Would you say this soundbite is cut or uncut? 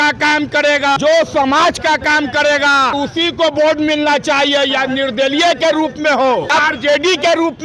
cut